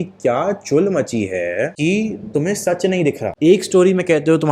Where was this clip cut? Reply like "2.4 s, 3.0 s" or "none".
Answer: 1.7 s, 3.3 s

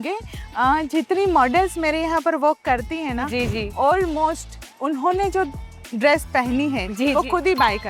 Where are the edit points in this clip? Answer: none

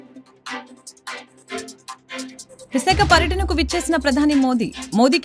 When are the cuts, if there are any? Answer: 2.4 s

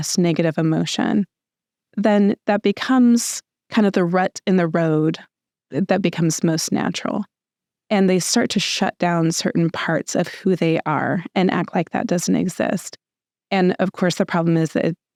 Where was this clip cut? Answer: none

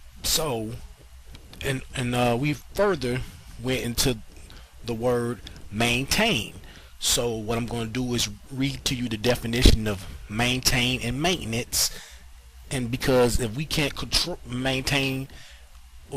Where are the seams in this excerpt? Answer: none

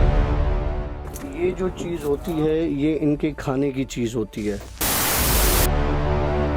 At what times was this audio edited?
none

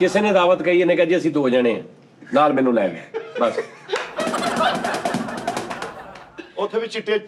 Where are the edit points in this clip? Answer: none

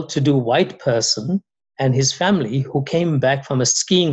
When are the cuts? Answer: none

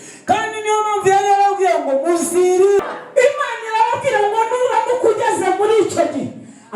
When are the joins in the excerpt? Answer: 2.9 s

